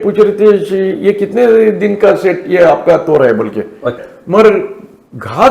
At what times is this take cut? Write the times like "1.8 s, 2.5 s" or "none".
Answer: 4.1 s